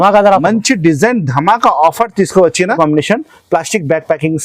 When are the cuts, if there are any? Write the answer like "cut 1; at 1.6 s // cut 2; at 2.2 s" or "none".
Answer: cut 1; at 2.8 s